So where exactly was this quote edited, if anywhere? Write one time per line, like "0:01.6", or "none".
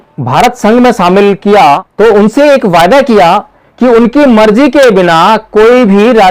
0:01.9